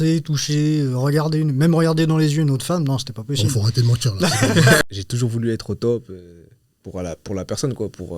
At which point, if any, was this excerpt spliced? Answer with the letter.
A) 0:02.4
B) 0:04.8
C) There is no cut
B